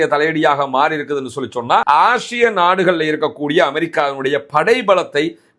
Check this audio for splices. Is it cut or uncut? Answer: cut